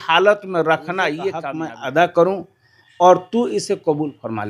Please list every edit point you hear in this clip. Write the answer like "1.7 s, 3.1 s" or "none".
1.5 s